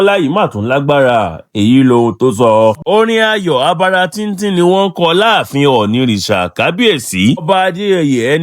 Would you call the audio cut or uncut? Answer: cut